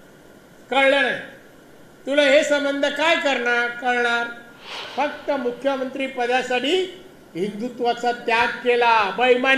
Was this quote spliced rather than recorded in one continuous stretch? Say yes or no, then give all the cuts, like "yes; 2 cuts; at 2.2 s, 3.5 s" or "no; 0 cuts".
yes; 1 cut; at 4.8 s